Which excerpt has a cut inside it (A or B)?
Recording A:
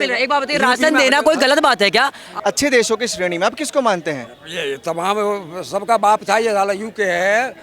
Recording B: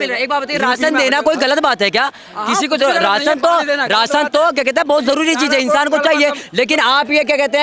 A